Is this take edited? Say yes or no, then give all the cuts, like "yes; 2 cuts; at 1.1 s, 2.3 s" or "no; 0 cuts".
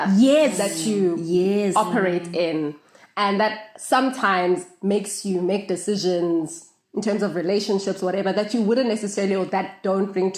no; 0 cuts